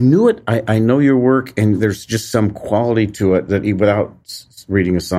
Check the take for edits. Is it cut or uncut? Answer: uncut